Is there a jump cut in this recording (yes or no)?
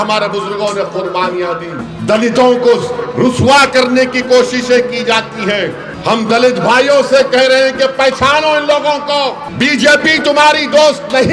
yes